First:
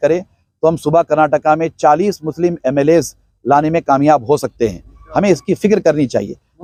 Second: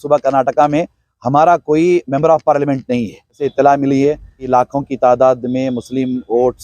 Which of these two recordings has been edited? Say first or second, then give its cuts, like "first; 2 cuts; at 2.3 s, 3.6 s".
second; 2 cuts; at 3.4 s, 4.5 s